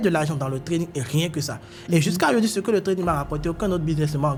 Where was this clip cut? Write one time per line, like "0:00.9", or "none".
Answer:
none